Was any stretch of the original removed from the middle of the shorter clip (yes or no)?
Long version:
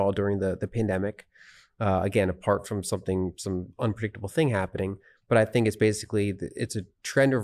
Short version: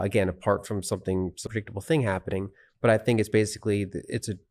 yes